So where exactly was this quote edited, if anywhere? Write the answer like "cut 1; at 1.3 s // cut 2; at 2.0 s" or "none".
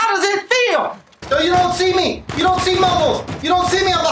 cut 1; at 1.1 s